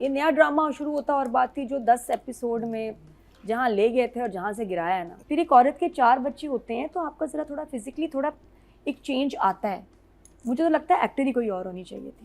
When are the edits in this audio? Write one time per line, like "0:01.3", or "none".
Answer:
0:05.1